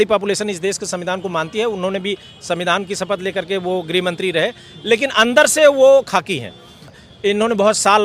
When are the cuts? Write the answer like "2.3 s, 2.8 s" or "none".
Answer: 6.9 s